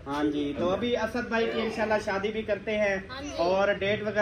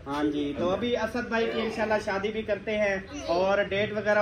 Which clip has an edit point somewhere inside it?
second; 1 cut; at 3.1 s

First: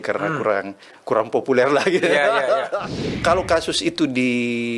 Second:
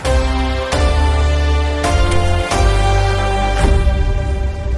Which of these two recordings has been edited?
first; 1 cut; at 2.9 s

